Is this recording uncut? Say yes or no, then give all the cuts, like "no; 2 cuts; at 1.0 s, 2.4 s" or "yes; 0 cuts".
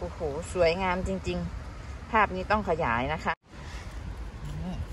no; 1 cut; at 3.4 s